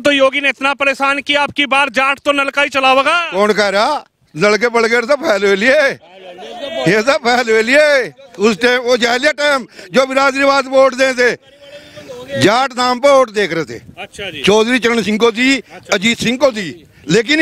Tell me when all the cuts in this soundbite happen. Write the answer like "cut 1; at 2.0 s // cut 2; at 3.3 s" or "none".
none

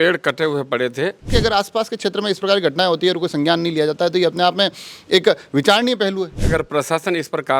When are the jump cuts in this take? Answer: cut 1; at 1.3 s // cut 2; at 6.4 s

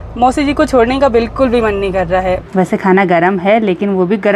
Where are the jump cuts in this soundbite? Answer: cut 1; at 2.4 s

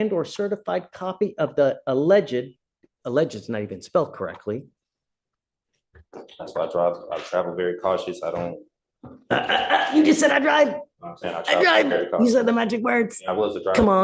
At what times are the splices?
cut 1; at 5.2 s

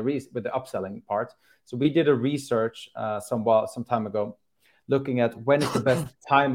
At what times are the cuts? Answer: none

